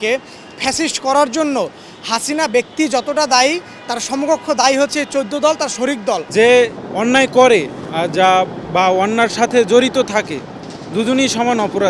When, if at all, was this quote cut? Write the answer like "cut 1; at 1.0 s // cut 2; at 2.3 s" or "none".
cut 1; at 6.3 s // cut 2; at 6.8 s // cut 3; at 7.8 s

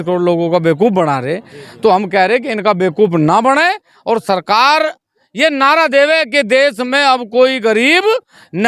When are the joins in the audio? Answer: none

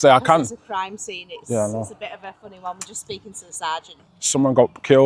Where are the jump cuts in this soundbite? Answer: cut 1; at 4.0 s

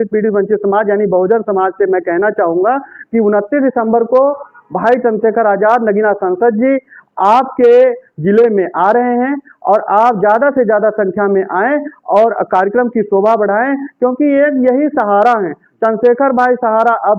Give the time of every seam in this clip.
none

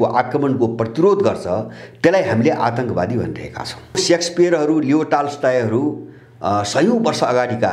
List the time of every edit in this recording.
cut 1; at 4.0 s

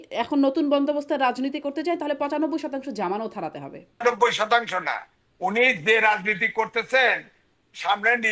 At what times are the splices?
cut 1; at 4.0 s

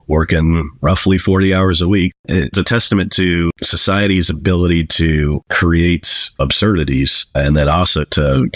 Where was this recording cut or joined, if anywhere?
cut 1; at 2.2 s // cut 2; at 3.7 s // cut 3; at 5.5 s

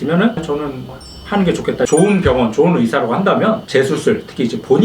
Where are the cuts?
cut 1; at 1.9 s // cut 2; at 3.6 s

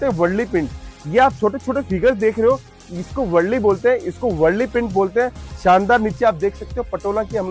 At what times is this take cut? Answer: none

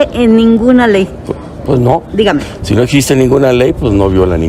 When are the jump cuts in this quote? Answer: none

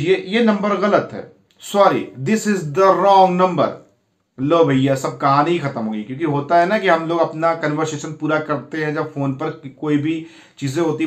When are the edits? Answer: none

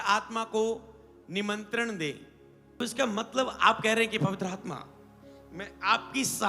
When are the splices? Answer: cut 1; at 2.8 s

